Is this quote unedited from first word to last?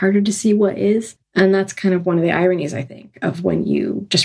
no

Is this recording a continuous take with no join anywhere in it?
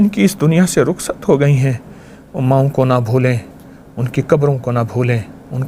yes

